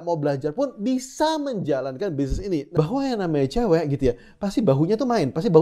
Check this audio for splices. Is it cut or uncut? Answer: cut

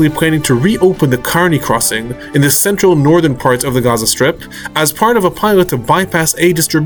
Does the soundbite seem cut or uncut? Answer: uncut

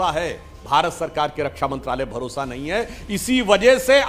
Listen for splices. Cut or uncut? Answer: uncut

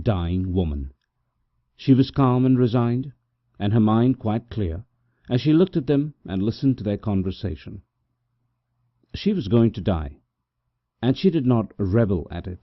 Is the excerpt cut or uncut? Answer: cut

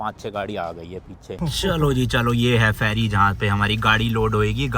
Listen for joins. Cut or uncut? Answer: cut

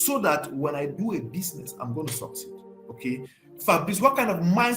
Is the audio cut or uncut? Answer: uncut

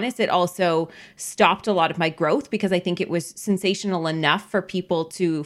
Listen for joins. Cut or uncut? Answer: uncut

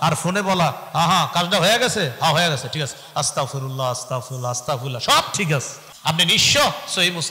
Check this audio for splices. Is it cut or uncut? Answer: cut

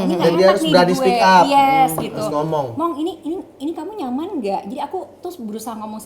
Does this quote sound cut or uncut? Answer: uncut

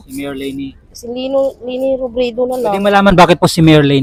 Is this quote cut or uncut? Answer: uncut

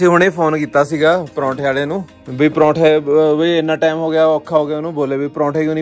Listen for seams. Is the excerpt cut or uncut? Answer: cut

